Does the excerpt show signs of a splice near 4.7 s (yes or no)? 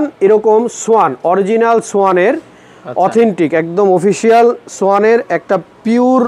no